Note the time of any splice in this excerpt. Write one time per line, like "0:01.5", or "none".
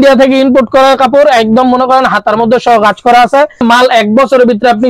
0:03.6